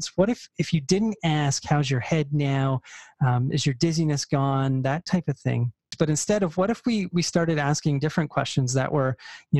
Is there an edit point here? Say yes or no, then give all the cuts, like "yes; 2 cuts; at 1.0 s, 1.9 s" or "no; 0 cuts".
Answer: yes; 1 cut; at 5.9 s